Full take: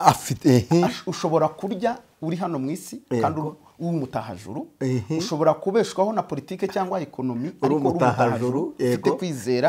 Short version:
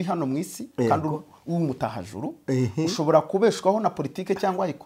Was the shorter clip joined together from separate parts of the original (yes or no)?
no